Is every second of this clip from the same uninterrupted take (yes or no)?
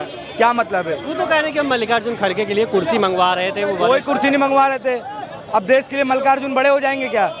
yes